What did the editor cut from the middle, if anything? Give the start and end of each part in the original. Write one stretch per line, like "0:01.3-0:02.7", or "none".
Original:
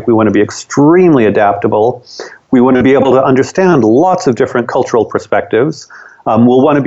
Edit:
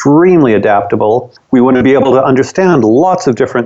0:02.1-0:02.3